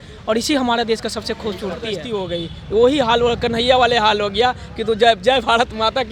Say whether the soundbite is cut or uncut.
cut